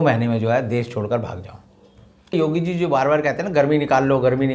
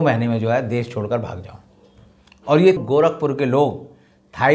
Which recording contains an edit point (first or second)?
first